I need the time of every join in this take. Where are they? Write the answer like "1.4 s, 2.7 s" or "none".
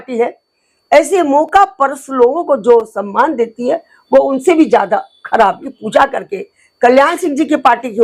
5.7 s